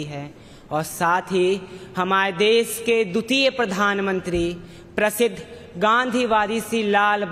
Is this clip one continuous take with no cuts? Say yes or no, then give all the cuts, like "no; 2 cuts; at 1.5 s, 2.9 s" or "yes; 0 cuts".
yes; 0 cuts